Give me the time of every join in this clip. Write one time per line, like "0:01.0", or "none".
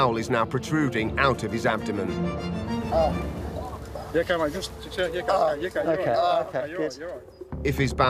none